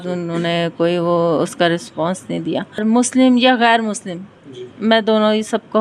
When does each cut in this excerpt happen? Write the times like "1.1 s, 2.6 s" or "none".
2.8 s